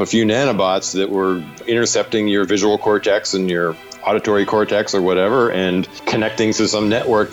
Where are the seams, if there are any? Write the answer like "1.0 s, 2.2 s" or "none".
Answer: 1.6 s, 6.0 s